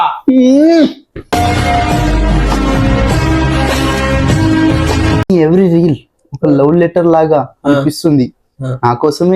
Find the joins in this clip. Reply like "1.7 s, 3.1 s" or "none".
5.3 s